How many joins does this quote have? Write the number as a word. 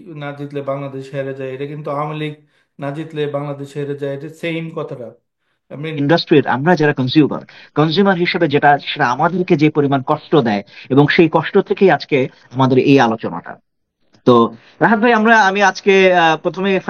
one